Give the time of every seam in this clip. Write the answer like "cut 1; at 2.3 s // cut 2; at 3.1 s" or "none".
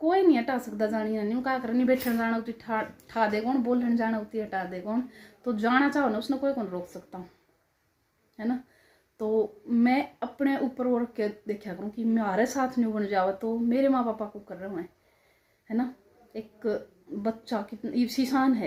none